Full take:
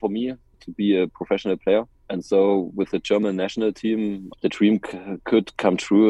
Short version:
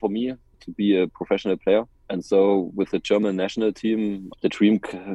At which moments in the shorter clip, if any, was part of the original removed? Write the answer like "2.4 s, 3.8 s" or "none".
none